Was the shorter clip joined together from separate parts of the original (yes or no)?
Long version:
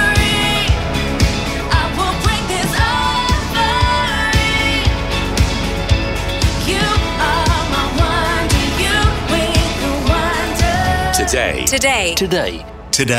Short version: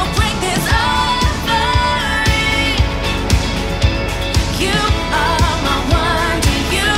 no